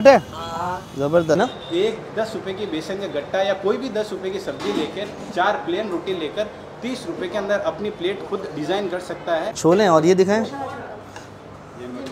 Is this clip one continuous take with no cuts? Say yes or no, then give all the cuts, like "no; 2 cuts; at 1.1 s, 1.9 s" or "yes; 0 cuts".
no; 2 cuts; at 1.4 s, 9.5 s